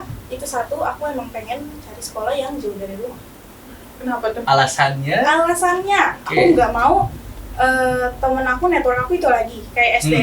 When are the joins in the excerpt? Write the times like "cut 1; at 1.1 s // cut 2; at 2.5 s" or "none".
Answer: none